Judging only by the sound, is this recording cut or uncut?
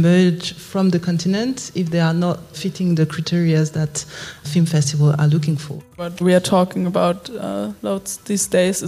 cut